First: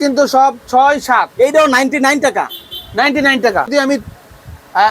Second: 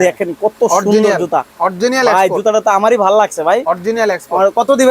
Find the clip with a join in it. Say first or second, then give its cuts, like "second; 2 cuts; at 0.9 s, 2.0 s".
first; 1 cut; at 3.7 s